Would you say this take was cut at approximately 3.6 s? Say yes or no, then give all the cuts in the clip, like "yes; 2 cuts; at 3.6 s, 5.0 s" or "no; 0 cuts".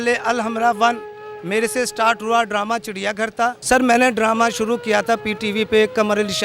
yes; 1 cut; at 3.6 s